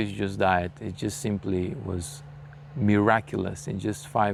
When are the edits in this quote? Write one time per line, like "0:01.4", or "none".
none